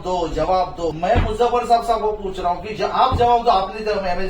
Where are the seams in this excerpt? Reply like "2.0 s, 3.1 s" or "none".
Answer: 1.0 s